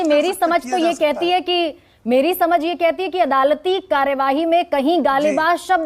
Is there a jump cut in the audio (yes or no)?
no